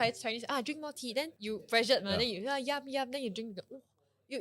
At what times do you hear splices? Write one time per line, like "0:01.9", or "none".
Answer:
0:01.3